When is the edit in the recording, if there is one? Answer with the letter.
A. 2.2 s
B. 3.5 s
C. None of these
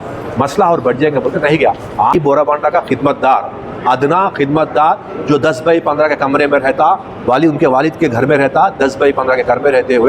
A